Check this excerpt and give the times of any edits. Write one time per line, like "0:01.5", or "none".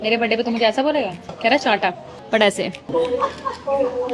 0:02.3